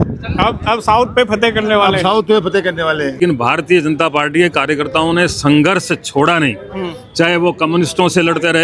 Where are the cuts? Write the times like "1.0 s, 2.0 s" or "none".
3.2 s